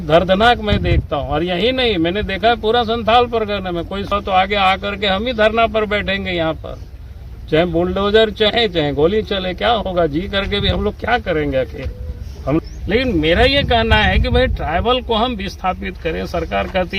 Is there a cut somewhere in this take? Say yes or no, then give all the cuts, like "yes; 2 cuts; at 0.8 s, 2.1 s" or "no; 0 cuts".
yes; 2 cuts; at 4.1 s, 12.6 s